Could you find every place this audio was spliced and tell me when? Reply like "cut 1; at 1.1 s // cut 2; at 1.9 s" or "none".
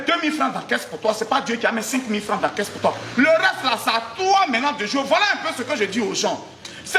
none